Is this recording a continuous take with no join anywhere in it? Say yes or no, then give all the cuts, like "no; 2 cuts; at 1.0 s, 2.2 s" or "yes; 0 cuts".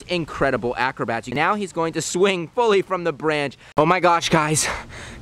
no; 2 cuts; at 1.3 s, 3.6 s